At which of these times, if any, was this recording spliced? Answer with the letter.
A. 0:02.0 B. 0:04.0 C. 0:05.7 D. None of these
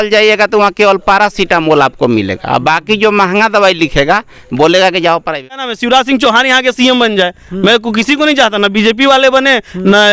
C